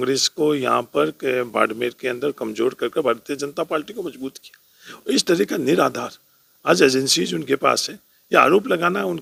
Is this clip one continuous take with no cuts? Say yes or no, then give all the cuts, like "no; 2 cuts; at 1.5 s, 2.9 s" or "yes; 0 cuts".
yes; 0 cuts